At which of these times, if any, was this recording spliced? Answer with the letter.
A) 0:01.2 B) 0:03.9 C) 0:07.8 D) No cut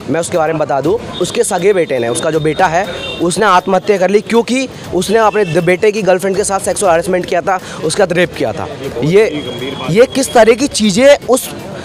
A